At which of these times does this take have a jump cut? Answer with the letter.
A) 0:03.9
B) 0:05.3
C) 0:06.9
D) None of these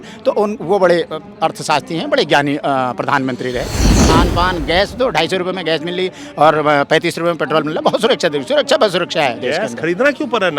A